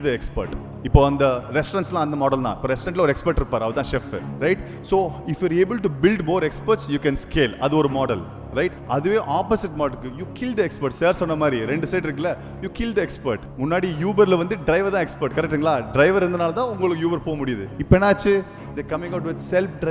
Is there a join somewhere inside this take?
no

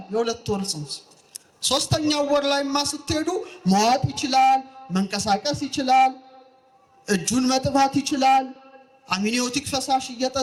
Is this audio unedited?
yes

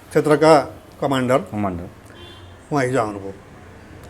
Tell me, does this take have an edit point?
no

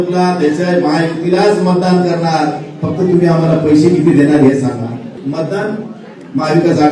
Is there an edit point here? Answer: yes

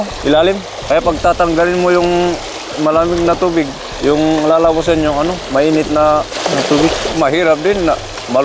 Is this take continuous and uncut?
no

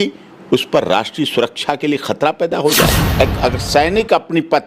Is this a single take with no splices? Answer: no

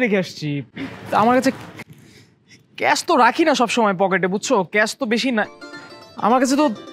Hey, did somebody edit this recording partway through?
no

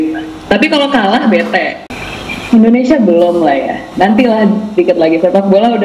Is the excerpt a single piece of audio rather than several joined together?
no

